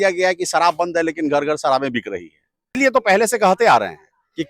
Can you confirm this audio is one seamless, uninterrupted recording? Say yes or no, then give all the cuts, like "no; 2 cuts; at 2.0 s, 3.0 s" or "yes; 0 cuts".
no; 1 cut; at 2.6 s